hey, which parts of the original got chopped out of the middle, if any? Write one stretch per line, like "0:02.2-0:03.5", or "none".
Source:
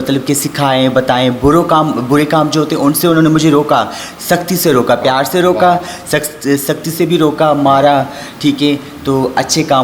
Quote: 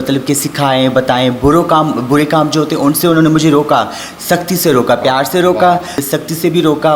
0:06.0-0:06.6